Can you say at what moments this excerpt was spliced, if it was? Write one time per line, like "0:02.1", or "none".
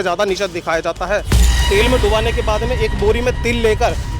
0:01.4